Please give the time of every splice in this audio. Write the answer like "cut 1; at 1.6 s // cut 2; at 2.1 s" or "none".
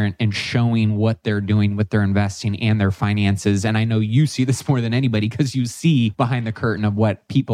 cut 1; at 6.1 s